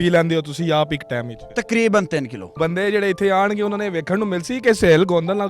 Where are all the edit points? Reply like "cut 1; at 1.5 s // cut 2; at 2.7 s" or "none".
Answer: cut 1; at 1.5 s // cut 2; at 2.5 s